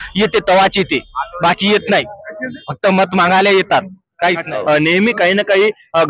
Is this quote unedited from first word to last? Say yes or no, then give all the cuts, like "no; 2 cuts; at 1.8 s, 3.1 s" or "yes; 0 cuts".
no; 1 cut; at 4.5 s